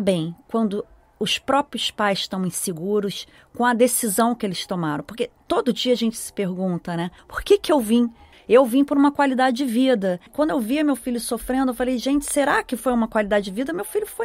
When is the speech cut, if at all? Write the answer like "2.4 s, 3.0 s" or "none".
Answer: none

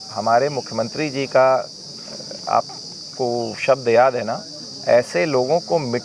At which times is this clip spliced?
none

